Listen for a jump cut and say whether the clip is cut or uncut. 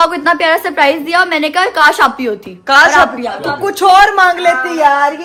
uncut